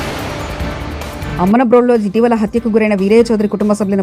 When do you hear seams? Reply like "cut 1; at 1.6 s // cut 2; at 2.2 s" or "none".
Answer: cut 1; at 1.3 s